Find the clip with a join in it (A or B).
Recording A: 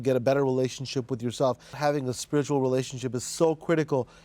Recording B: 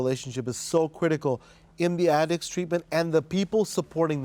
A